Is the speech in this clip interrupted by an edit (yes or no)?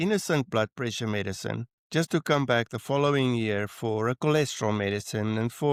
no